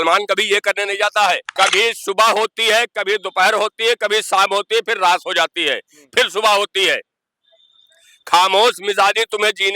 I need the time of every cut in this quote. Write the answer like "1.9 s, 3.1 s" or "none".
1.5 s